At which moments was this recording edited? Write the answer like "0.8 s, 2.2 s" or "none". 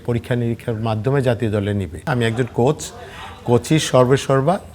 2.1 s